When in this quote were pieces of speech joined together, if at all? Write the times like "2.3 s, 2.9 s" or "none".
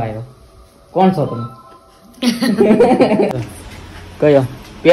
3.3 s